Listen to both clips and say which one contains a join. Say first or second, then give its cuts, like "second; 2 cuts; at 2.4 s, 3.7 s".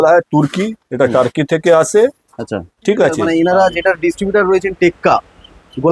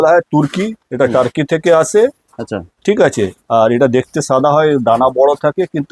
first; 1 cut; at 3.2 s